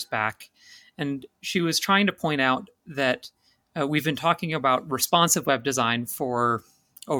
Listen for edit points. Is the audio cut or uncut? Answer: uncut